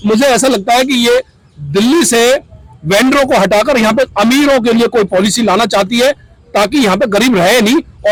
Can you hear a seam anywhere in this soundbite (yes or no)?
no